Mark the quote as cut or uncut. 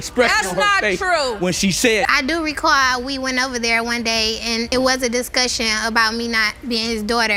uncut